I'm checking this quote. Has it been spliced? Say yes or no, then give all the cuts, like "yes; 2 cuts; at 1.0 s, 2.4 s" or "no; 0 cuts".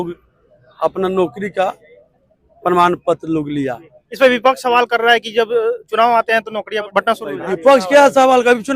yes; 1 cut; at 6.9 s